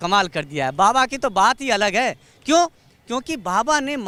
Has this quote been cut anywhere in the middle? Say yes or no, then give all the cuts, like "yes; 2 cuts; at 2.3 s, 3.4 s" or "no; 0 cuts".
no; 0 cuts